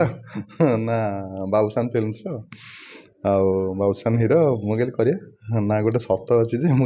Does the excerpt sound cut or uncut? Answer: uncut